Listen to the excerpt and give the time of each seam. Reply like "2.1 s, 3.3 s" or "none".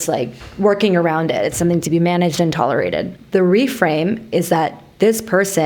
3.1 s